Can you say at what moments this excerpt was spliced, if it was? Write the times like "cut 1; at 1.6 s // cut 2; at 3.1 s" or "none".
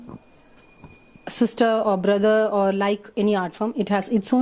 cut 1; at 1.8 s